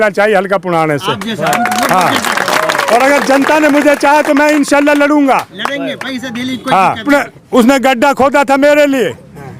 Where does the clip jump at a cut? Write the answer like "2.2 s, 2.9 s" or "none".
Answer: 7.0 s